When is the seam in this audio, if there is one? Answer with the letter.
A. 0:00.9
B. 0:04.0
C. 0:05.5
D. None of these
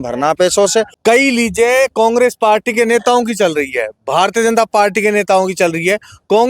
A